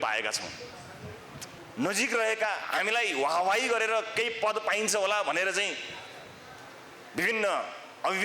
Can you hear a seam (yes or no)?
yes